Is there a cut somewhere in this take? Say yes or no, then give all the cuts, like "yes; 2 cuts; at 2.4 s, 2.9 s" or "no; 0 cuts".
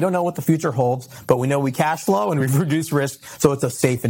no; 0 cuts